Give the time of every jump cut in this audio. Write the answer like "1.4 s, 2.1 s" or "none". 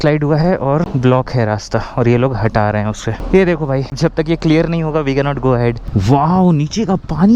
3.1 s, 4.0 s, 5.8 s

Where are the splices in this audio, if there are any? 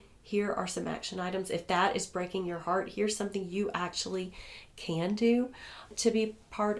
5.9 s

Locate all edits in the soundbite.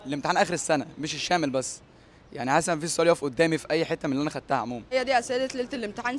4.8 s

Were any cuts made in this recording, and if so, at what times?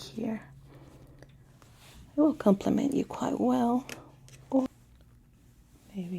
4.7 s

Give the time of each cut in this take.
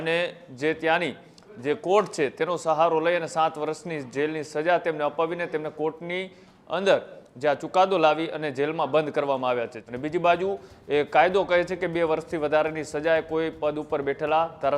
9.8 s

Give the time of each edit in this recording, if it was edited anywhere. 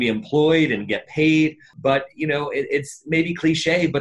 1.7 s

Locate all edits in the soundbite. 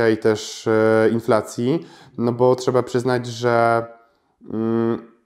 none

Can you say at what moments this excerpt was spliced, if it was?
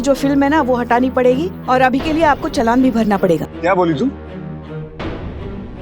3.5 s

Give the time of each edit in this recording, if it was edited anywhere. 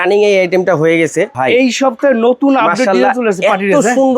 1.3 s

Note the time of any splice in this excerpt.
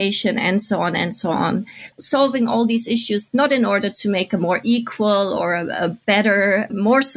none

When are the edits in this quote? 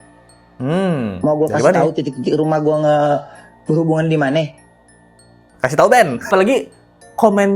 6.3 s

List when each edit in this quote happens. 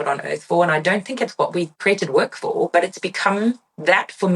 1.7 s

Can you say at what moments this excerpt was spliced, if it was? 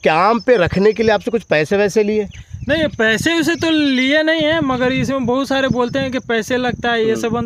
none

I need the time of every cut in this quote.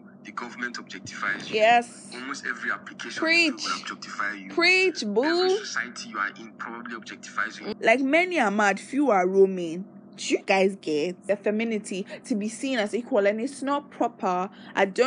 7.6 s, 11.2 s

